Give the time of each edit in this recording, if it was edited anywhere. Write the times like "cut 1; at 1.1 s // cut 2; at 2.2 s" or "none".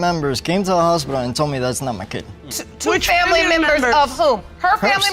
none

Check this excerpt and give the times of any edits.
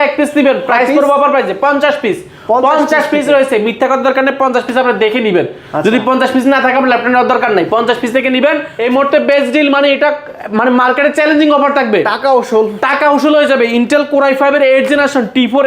cut 1; at 8.7 s

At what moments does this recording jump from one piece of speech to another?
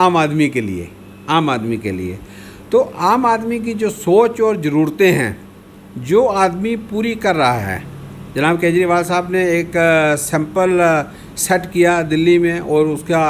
none

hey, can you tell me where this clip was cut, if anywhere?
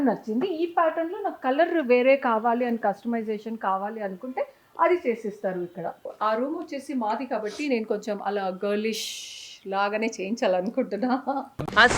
cut 1; at 6.1 s

